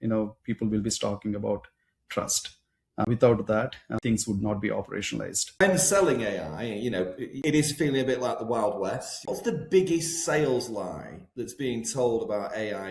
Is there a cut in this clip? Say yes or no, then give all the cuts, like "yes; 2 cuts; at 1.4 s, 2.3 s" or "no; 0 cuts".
yes; 5 cuts; at 3.1 s, 4.0 s, 5.6 s, 7.4 s, 9.2 s